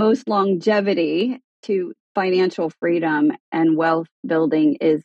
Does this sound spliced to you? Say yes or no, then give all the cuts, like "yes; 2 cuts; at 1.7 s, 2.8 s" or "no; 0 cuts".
yes; 2 cuts; at 1.8 s, 3.4 s